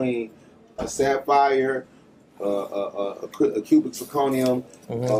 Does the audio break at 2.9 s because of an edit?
no; 0 cuts

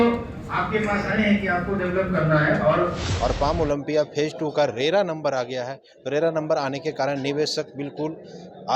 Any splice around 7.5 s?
no; 1 cut; at 3.1 s

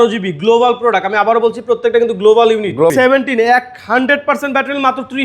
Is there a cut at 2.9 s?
yes; 1 cut; at 2.9 s

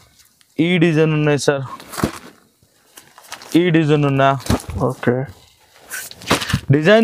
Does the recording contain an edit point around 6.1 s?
no; 0 cuts

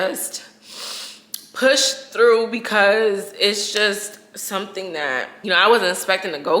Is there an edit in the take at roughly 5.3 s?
yes; 1 cut; at 5.3 s

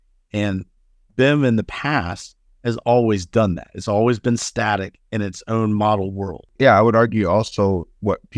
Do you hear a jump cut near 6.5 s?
yes; 1 cut; at 6.5 s

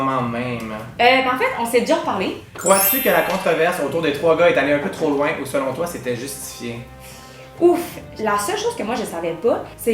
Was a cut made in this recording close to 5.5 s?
no; 2 cuts; at 2.4 s, 8.1 s

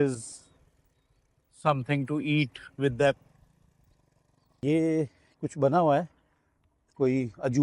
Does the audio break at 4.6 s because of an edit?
yes; 1 cut; at 4.6 s

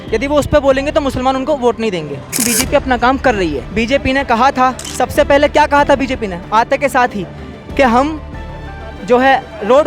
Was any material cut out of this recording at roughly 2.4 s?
yes; 3 cuts; at 2.4 s, 3.6 s, 4.8 s

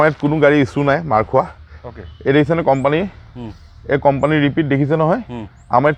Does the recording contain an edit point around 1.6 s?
no; 0 cuts

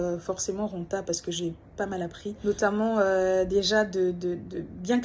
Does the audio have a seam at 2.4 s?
yes; 1 cut; at 2.4 s

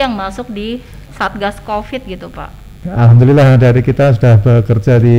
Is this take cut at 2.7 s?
yes; 1 cut; at 2.7 s

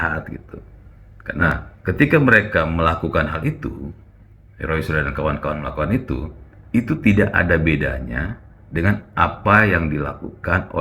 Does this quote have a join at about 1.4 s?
yes; 1 cut; at 1.4 s

